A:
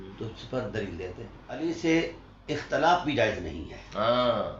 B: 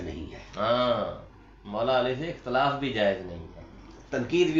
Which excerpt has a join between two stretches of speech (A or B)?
A